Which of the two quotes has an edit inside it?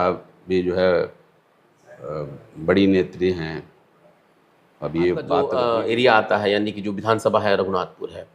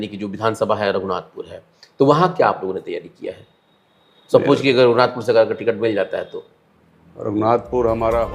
first; 1 cut; at 5.5 s

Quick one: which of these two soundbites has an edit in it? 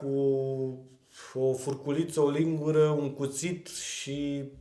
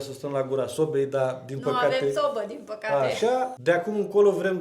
second; 1 cut; at 3.5 s

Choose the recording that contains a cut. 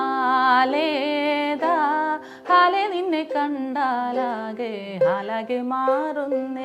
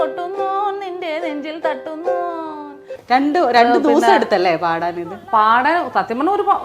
second; 1 cut; at 2.9 s

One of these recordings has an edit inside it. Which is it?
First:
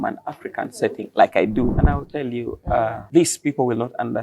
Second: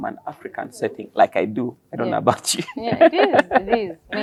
first; 2 cuts; at 1.7 s, 3.0 s

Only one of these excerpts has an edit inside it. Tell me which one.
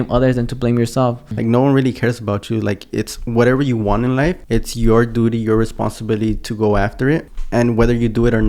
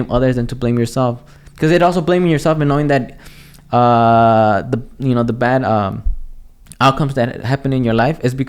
first; 3 cuts; at 1.3 s, 4.4 s, 7.3 s

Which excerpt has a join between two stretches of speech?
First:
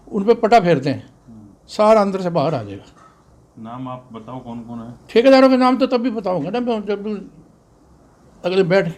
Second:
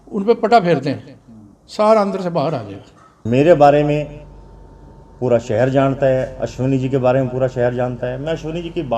second; 1 cut; at 3.2 s

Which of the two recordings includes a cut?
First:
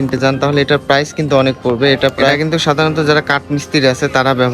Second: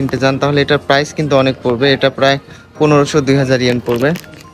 first; 1 cut; at 2.4 s

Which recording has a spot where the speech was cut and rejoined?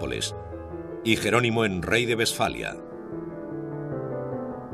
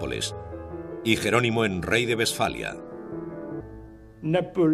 first; 1 cut; at 3.7 s

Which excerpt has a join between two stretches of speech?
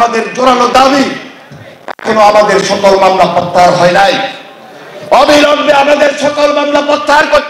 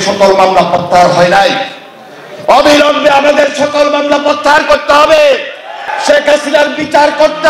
second; 1 cut; at 5.9 s

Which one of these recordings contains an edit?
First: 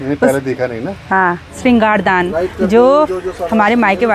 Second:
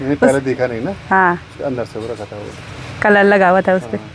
first; 1 cut; at 1.5 s

